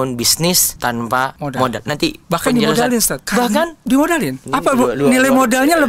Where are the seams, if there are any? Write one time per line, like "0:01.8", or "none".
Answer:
0:01.1
0:03.2
0:04.4

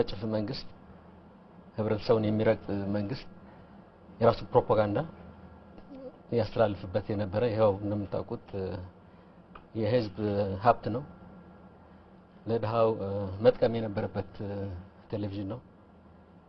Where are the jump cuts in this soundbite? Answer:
0:08.0

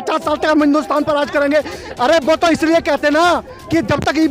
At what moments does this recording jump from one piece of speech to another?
none

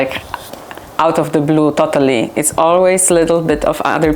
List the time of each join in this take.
none

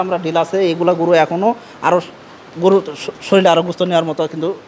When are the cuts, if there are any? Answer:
none

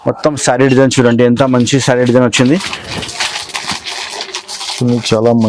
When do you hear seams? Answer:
none

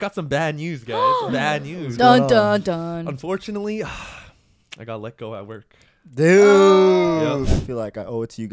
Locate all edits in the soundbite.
0:07.6

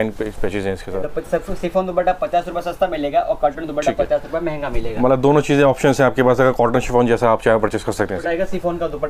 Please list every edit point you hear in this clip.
0:01.0
0:08.2

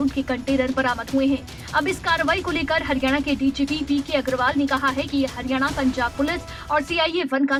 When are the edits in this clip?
none

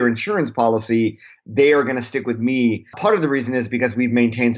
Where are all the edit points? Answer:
0:03.0

